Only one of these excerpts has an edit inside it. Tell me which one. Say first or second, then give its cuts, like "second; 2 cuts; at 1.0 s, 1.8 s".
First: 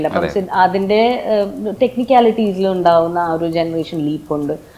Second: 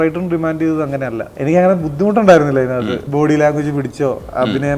second; 2 cuts; at 1.3 s, 3.0 s